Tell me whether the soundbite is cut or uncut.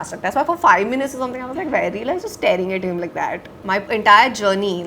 cut